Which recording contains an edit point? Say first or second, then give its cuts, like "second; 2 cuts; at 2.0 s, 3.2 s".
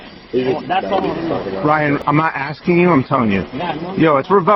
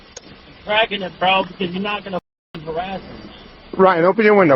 first; 1 cut; at 1.6 s